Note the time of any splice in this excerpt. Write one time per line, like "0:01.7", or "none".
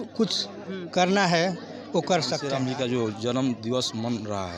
0:02.4